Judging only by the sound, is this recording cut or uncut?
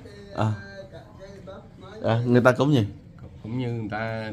uncut